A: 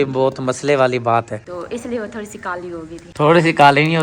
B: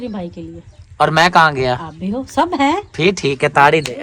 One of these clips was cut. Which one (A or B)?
A